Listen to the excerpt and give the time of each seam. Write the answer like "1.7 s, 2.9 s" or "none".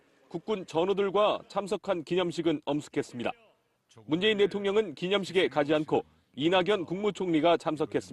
2.0 s